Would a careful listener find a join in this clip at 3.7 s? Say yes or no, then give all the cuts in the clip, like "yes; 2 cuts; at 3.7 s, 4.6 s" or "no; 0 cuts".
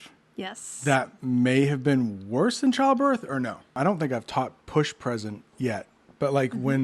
yes; 1 cut; at 3.7 s